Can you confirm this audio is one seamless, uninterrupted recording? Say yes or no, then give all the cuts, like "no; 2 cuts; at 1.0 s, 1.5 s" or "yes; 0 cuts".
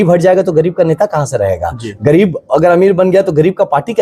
yes; 0 cuts